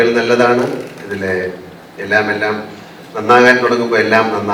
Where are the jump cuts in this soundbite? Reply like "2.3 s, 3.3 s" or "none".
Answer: none